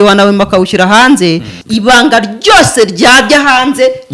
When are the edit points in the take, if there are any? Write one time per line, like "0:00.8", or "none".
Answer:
0:01.5